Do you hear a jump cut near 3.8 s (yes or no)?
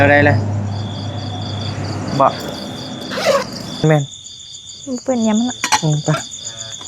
yes